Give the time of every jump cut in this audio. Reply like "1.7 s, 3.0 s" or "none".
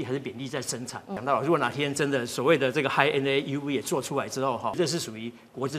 1.2 s, 4.7 s